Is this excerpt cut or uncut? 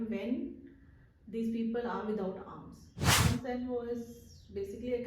cut